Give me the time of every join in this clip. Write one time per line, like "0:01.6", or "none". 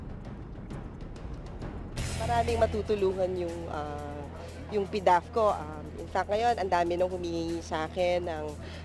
0:01.9

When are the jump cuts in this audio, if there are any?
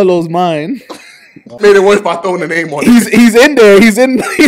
0:01.6

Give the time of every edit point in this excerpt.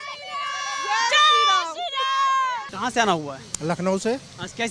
none

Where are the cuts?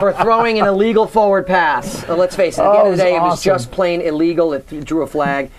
none

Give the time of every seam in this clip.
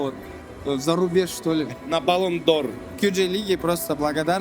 0:01.7
0:02.8

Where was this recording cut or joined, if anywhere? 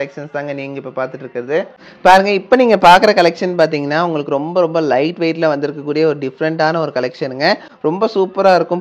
none

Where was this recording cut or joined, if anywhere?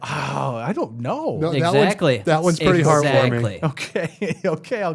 none

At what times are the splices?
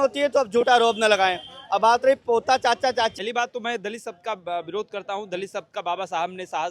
0:03.2

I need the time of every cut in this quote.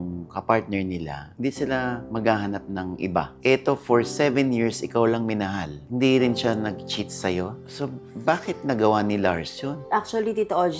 0:09.8

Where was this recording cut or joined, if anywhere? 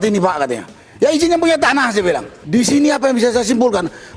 0:02.3

